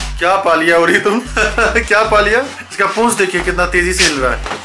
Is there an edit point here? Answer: yes; 2 cuts; at 1.4 s, 2.6 s

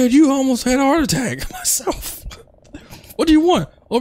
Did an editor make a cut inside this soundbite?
no; 0 cuts

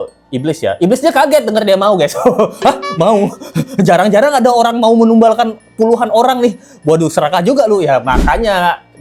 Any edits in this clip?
no; 0 cuts

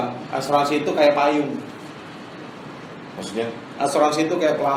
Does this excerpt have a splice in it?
no; 0 cuts

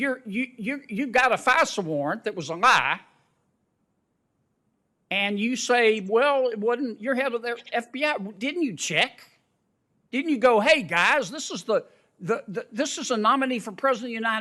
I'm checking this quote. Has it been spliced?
no; 0 cuts

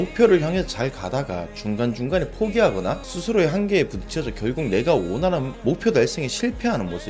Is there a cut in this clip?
no; 0 cuts

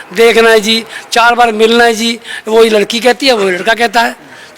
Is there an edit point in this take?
no; 0 cuts

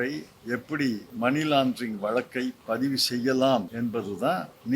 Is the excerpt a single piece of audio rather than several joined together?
no; 2 cuts; at 1.1 s, 4.1 s

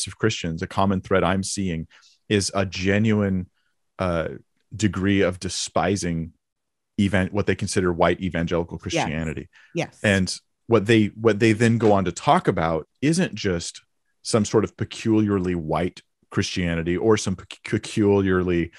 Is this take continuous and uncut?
yes; 0 cuts

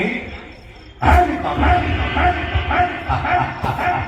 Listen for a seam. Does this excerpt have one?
no; 0 cuts

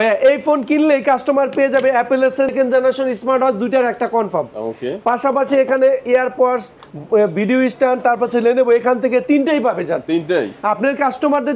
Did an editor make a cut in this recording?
yes; 1 cut; at 2.5 s

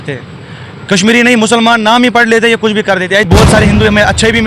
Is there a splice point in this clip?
yes; 1 cut; at 3.2 s

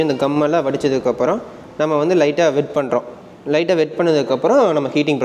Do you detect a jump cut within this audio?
no; 0 cuts

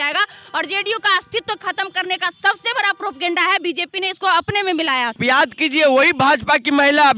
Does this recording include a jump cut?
yes; 1 cut; at 5.2 s

